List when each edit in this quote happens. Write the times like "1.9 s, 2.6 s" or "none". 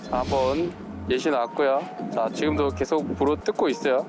2.0 s

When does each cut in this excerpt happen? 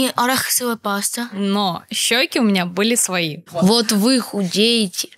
1.2 s, 3.4 s

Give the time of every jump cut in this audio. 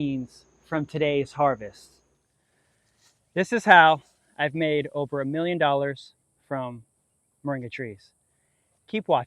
2.1 s

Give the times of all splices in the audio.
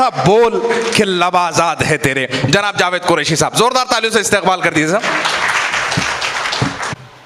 none

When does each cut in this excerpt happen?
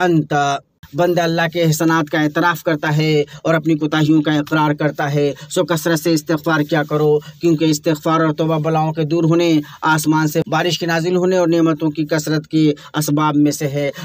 0.8 s, 10.4 s

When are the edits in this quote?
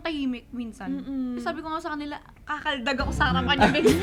none

